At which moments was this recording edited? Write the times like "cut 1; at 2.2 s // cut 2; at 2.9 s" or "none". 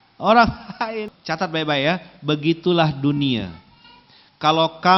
cut 1; at 1.1 s

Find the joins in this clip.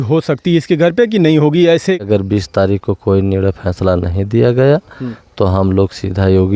cut 1; at 2.0 s

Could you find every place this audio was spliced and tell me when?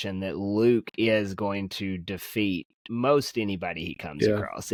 none

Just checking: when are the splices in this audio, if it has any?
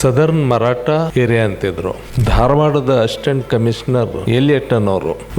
cut 1; at 2.1 s

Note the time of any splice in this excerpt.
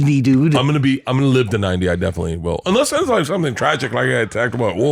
none

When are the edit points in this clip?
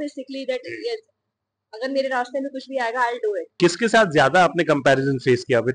cut 1; at 3.5 s

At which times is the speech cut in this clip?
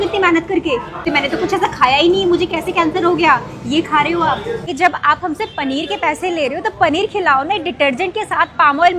cut 1; at 1.0 s // cut 2; at 4.7 s

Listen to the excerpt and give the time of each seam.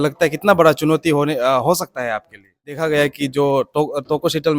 cut 1; at 2.7 s

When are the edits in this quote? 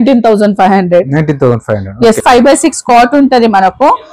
cut 1; at 2.2 s

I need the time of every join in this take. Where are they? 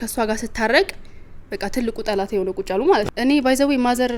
cut 1; at 3.1 s

